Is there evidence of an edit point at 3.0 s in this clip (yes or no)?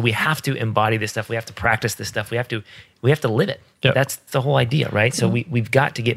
no